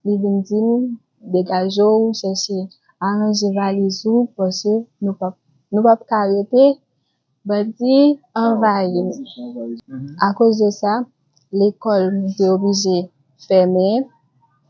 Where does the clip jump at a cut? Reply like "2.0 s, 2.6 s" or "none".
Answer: 9.7 s